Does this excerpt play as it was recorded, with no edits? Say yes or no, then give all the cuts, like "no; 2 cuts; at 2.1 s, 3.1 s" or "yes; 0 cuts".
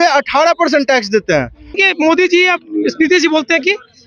no; 1 cut; at 1.8 s